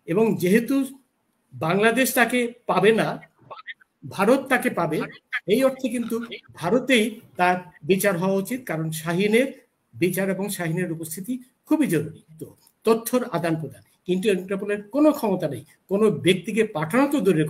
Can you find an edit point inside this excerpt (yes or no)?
yes